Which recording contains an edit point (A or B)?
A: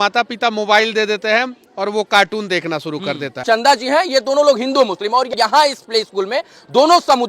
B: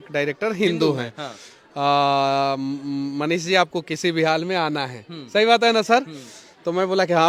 A